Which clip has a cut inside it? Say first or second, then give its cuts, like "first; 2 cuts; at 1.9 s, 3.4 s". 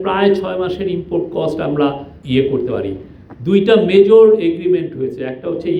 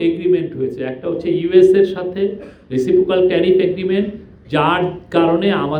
first; 1 cut; at 2.1 s